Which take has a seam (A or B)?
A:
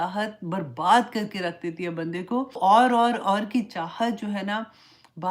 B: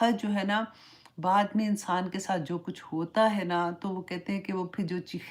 A